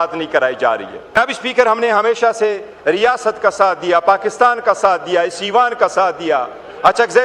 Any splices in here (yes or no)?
yes